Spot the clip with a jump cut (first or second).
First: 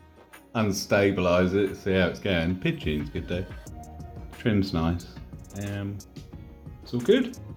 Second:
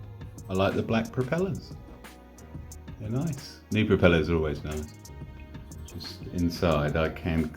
second